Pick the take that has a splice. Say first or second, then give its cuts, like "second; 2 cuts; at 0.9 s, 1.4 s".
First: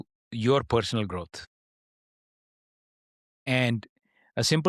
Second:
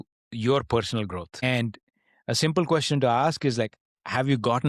second; 1 cut; at 1.4 s